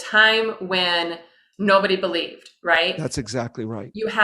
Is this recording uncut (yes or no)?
yes